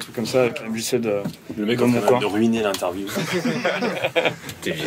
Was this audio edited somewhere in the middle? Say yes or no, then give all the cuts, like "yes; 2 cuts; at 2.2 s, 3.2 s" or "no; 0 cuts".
no; 0 cuts